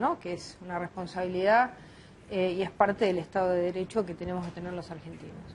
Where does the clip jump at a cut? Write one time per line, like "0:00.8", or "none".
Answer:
0:03.0